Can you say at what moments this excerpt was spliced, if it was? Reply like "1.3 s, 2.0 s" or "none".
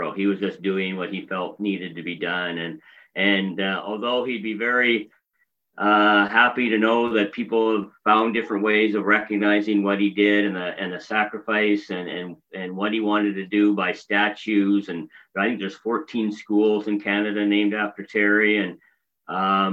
none